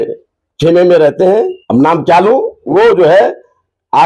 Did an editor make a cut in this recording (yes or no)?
yes